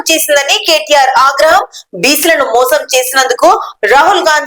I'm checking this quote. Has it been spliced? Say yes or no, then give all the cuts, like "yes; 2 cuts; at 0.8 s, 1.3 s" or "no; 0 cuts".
no; 0 cuts